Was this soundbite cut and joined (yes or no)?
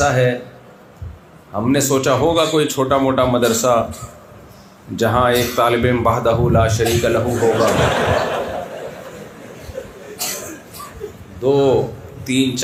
no